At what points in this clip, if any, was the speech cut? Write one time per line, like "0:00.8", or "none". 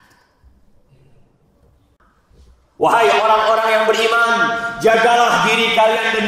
0:02.0